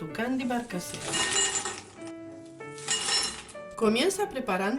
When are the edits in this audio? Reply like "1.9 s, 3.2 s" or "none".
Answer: none